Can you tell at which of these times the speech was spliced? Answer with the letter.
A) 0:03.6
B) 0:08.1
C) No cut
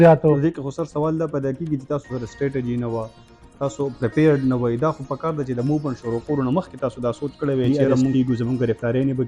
B